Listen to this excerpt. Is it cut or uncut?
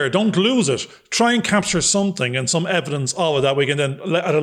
uncut